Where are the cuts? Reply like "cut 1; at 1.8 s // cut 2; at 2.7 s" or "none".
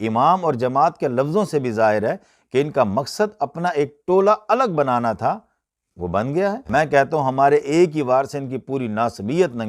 cut 1; at 6.6 s